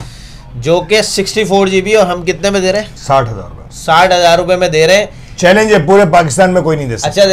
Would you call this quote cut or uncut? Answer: uncut